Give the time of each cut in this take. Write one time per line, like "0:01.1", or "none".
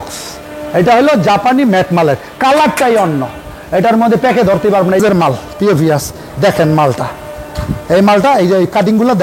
0:05.0